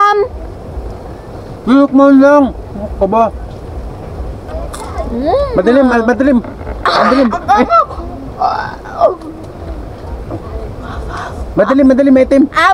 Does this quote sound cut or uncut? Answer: cut